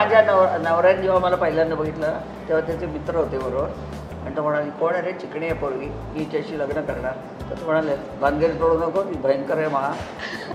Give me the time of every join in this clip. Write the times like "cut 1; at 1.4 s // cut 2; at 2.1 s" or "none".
none